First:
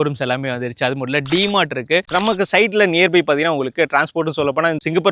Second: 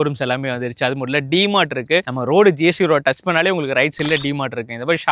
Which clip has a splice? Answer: first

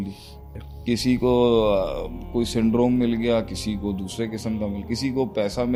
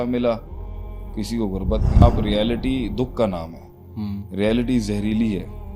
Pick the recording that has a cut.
second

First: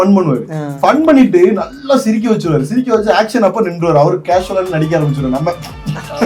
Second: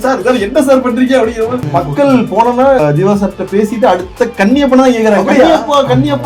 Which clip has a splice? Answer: second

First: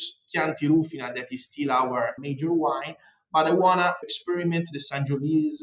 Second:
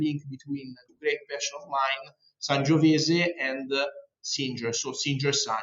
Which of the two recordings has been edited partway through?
first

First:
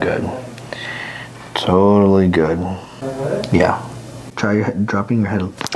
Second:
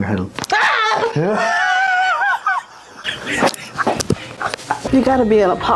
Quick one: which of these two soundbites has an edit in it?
second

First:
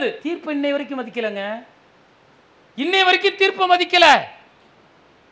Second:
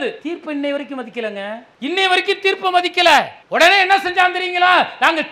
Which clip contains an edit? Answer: second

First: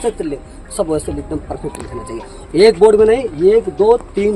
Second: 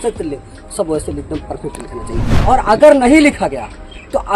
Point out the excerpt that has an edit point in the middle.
second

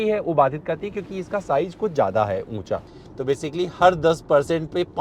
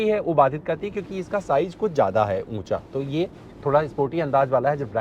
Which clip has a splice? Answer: first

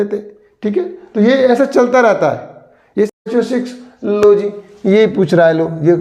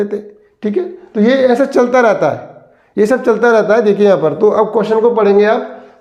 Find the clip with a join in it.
first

